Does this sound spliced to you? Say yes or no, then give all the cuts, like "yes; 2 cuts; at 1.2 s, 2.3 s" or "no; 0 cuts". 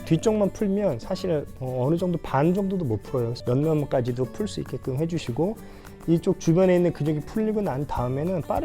yes; 2 cuts; at 1.6 s, 3.3 s